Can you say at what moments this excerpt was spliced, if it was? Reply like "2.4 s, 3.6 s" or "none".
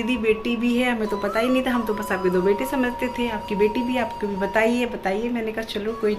none